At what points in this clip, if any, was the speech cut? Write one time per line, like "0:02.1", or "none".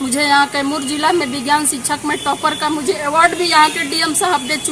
none